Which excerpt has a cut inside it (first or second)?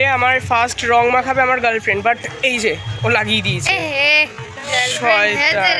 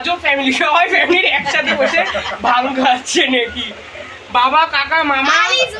first